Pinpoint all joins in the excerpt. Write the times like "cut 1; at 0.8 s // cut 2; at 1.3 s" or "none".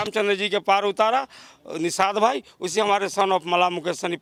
none